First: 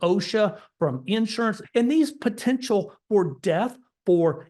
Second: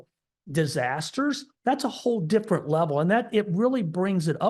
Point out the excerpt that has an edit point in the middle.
first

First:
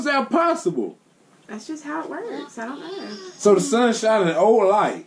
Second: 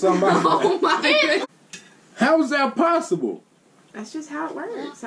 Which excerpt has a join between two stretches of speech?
second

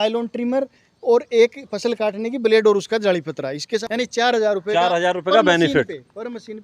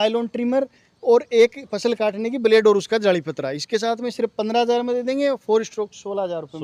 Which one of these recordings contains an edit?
first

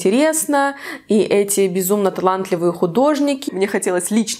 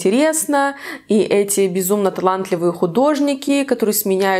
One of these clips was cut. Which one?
first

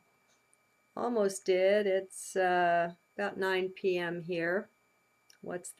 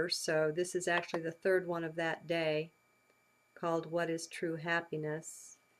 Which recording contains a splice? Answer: second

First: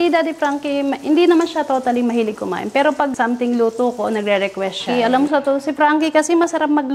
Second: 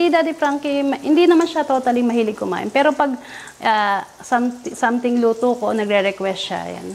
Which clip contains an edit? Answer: first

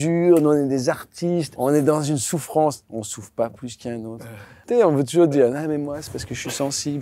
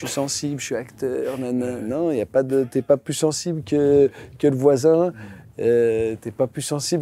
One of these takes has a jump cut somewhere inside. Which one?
first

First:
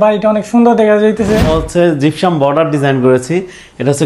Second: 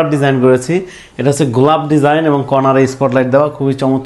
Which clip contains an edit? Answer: first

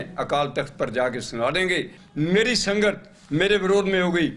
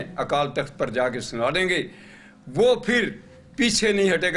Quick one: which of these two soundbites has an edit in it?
first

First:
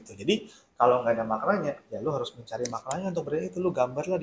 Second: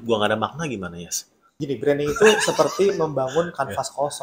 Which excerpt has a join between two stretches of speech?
second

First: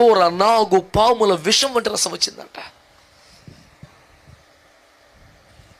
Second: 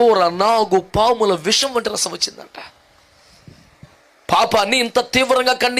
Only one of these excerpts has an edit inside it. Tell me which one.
second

